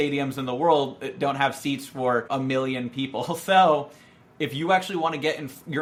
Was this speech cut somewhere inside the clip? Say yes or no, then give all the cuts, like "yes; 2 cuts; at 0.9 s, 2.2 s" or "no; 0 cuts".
no; 0 cuts